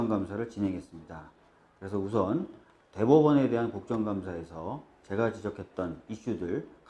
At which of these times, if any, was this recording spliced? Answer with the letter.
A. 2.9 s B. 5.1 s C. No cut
A